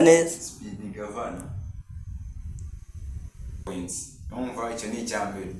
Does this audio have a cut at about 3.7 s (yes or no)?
yes